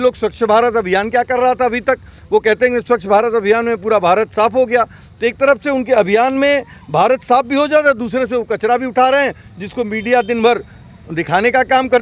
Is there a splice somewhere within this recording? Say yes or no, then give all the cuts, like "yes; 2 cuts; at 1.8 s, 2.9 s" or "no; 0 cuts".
no; 0 cuts